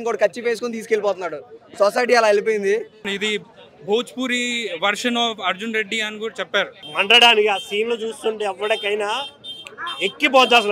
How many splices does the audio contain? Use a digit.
2